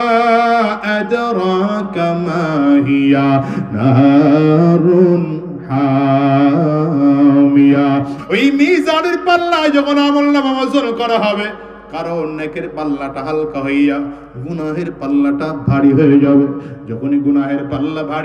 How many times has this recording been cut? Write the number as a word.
one